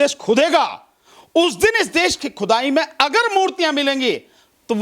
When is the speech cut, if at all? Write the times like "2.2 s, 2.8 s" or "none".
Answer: none